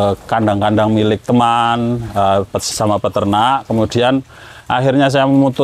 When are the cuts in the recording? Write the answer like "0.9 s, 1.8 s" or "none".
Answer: none